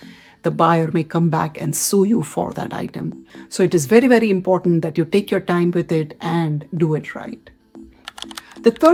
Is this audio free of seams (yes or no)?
yes